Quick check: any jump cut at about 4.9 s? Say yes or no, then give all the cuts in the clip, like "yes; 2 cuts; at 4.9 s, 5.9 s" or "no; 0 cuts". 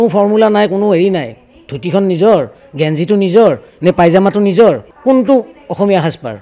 yes; 1 cut; at 4.9 s